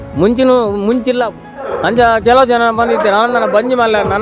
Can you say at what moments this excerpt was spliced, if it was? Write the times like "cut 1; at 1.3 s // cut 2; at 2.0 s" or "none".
cut 1; at 1.7 s